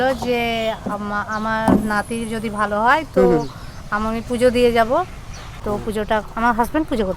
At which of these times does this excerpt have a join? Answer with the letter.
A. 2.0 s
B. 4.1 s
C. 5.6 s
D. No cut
C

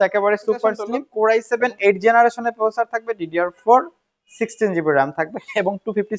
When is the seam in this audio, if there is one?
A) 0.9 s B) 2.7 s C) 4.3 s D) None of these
A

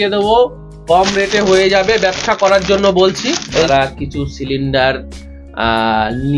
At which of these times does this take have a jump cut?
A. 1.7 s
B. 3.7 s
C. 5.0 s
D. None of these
B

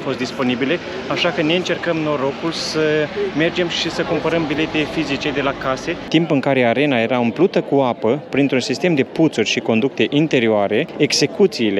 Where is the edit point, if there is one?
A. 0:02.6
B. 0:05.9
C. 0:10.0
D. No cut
B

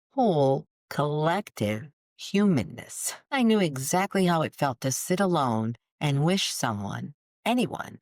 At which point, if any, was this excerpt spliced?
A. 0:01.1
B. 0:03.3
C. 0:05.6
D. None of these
B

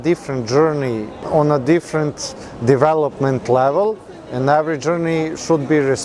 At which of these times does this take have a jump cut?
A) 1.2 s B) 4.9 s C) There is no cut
A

